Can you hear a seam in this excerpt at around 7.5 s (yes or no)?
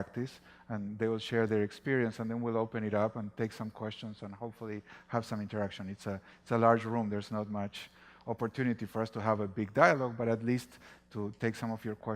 yes